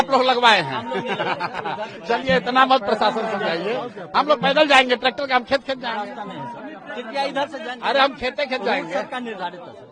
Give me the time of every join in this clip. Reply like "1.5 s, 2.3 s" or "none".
none